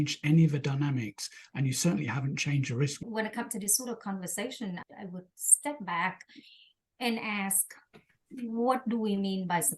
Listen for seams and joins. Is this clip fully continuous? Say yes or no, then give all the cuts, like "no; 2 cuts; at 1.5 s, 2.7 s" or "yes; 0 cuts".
no; 1 cut; at 3.0 s